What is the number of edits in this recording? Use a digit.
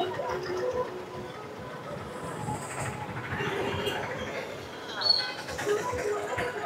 0